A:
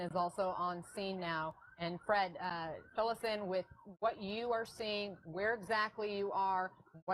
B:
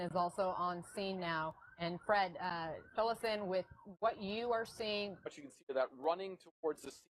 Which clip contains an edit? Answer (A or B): A